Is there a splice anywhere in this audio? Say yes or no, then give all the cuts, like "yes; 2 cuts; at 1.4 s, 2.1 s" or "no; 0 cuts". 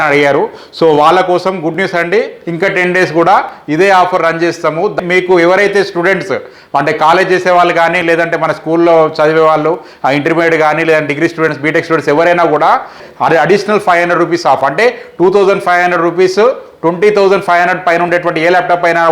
yes; 2 cuts; at 4.9 s, 13.0 s